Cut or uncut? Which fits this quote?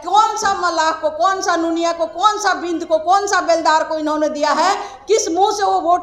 uncut